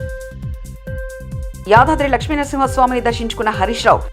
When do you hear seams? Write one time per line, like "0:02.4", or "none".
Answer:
0:01.4